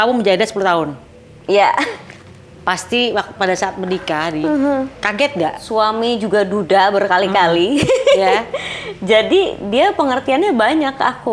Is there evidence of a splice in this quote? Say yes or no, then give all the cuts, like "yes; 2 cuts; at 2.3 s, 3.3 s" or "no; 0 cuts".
yes; 1 cut; at 5.6 s